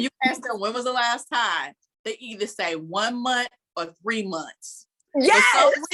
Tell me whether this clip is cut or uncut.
uncut